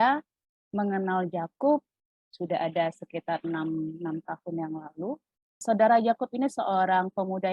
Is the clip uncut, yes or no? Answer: no